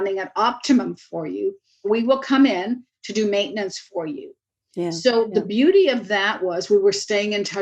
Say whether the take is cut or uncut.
cut